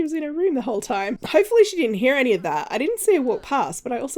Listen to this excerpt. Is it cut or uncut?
cut